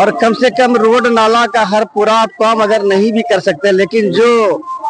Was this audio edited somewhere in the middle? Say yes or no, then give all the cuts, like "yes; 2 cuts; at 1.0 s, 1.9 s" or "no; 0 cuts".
no; 0 cuts